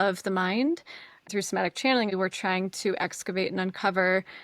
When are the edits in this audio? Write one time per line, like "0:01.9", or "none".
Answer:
0:01.2
0:02.1